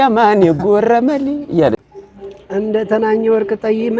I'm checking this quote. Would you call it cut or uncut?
cut